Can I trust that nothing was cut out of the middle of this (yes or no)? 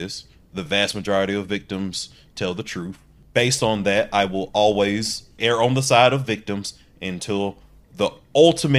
no